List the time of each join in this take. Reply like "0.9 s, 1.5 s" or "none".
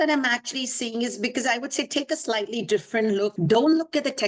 3.4 s